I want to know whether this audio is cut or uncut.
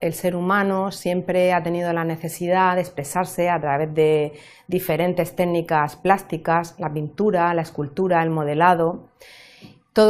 cut